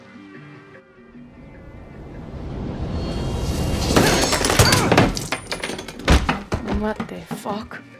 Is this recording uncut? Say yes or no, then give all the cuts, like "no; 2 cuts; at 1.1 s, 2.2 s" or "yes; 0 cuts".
yes; 0 cuts